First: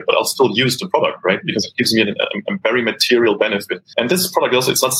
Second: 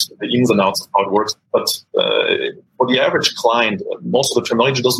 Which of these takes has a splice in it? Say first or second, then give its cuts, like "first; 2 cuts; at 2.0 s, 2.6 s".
first; 1 cut; at 3.8 s